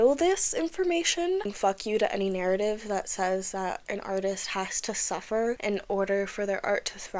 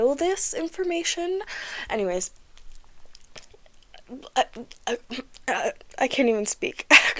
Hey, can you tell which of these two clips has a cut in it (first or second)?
first